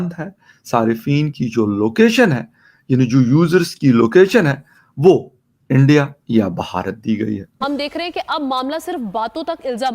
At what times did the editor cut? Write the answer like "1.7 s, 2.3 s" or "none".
7.5 s